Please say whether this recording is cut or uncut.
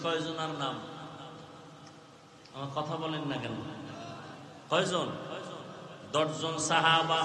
uncut